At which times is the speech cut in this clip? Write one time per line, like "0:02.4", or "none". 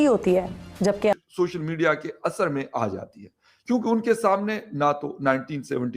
0:01.1